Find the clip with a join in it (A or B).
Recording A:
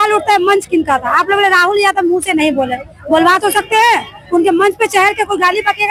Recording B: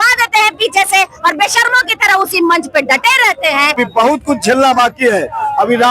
B